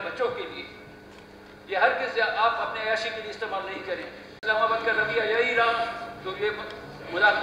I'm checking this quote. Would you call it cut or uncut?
cut